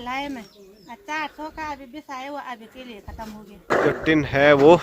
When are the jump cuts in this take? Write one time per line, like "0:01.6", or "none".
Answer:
0:03.7